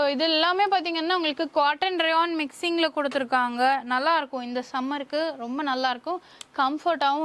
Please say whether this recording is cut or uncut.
uncut